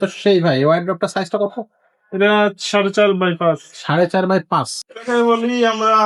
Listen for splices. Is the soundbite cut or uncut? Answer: cut